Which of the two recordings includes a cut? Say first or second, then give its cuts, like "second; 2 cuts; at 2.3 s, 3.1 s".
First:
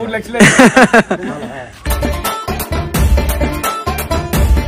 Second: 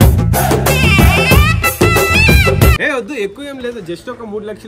second; 1 cut; at 2.8 s